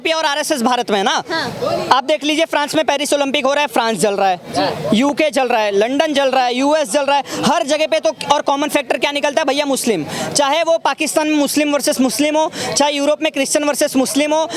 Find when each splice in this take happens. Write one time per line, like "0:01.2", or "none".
none